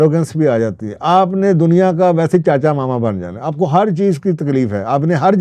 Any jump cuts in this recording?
no; 0 cuts

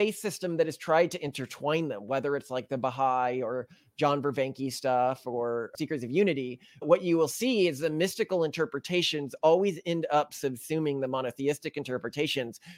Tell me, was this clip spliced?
yes; 1 cut; at 5.7 s

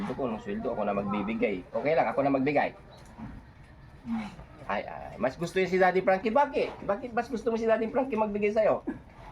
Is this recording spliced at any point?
no; 0 cuts

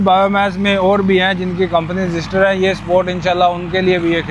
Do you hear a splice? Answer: no; 0 cuts

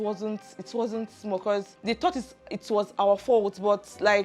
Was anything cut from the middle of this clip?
yes; 1 cut; at 1.7 s

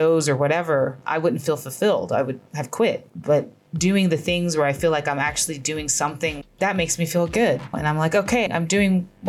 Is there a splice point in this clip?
yes; 3 cuts; at 3.0 s, 6.4 s, 7.8 s

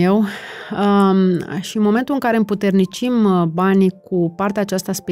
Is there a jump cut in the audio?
no; 0 cuts

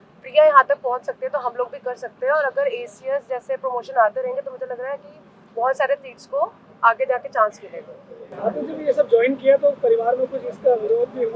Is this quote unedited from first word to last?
yes; 0 cuts

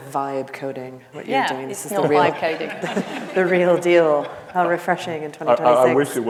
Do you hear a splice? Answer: no; 0 cuts

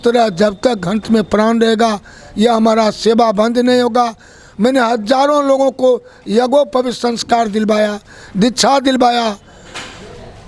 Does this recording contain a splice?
no; 0 cuts

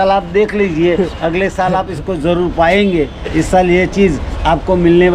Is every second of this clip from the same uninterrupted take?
yes; 0 cuts

